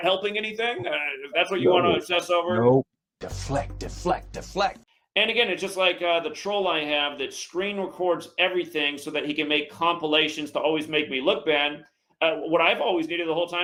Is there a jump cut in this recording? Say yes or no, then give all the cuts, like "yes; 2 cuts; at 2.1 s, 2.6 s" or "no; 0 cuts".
no; 0 cuts